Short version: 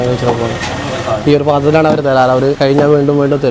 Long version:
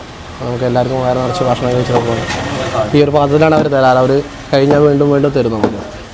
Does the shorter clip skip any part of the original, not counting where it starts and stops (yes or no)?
yes